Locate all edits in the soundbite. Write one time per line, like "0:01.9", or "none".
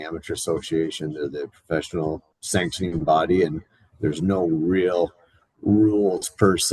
0:02.3